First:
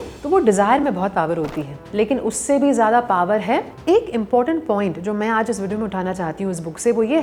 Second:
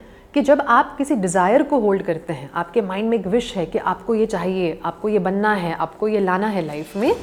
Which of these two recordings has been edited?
first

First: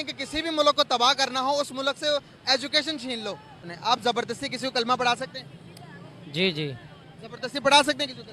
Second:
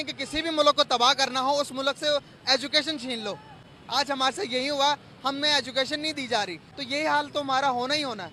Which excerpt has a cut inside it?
first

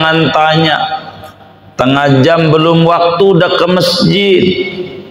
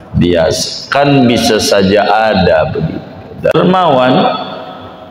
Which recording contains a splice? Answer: second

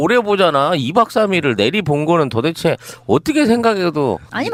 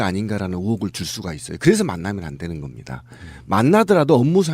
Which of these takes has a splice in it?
second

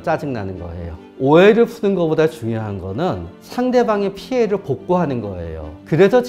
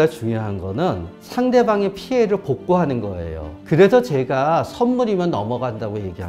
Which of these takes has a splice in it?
first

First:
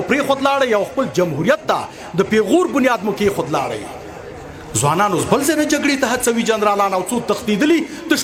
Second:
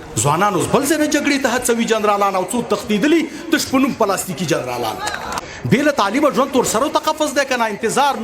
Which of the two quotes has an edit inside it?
second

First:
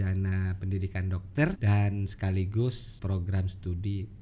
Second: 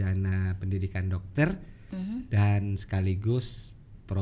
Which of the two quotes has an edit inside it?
first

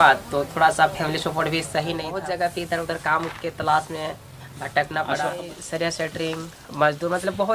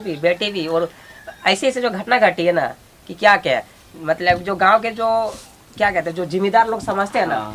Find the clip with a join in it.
first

